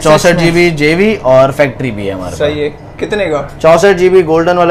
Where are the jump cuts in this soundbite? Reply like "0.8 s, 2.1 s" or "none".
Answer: none